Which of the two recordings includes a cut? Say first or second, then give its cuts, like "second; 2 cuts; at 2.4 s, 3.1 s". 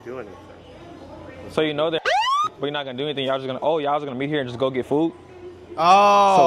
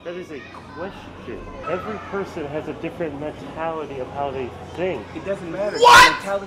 second; 1 cut; at 1.6 s